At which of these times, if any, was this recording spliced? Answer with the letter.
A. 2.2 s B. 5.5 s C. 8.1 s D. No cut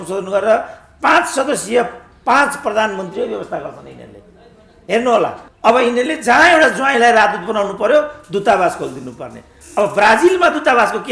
B